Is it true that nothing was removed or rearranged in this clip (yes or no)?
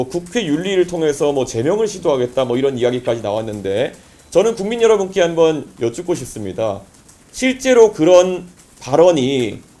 yes